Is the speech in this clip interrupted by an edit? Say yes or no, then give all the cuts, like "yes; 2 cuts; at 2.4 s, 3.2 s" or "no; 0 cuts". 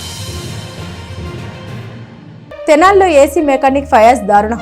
yes; 1 cut; at 2.4 s